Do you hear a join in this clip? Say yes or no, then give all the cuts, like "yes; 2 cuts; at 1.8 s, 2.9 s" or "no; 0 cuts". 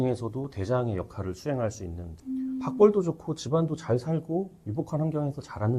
yes; 1 cut; at 2.1 s